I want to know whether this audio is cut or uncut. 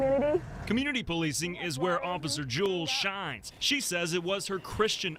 uncut